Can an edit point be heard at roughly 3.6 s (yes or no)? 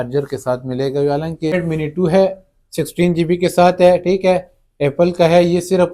no